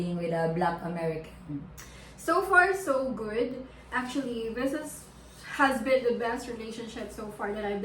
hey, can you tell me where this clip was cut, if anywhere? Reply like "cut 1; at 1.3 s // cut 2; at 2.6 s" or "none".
none